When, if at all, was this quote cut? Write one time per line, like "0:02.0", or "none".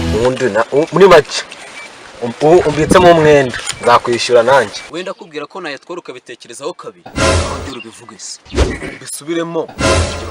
0:04.9